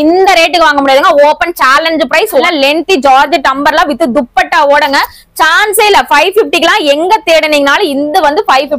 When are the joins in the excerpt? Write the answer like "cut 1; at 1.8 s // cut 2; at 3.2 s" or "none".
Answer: cut 1; at 2.5 s

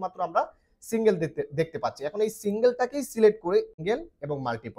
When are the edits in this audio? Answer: cut 1; at 3.7 s

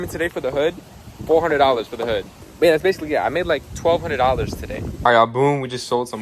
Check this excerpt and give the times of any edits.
cut 1; at 2.4 s // cut 2; at 4.8 s

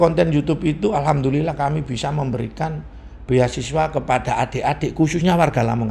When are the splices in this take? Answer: none

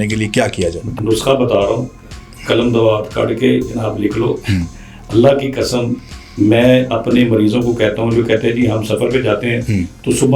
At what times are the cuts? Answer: cut 1; at 0.9 s

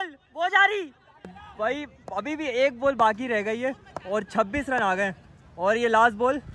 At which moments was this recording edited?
cut 1; at 1.4 s

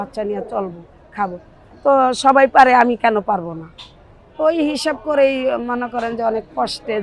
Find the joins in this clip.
none

